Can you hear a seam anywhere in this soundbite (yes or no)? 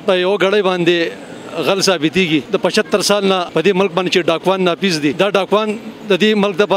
yes